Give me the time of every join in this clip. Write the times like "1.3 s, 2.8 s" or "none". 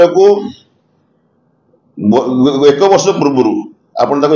none